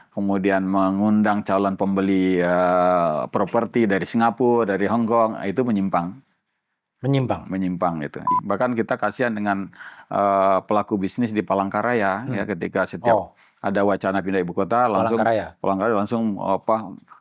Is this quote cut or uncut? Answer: cut